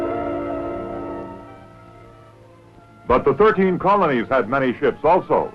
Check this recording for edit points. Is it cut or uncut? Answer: cut